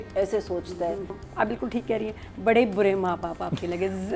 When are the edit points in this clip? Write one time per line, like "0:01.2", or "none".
0:01.2